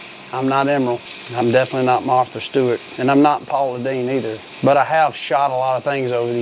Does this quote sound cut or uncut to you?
cut